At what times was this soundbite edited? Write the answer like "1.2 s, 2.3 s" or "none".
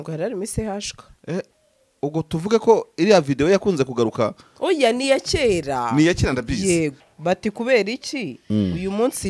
7.0 s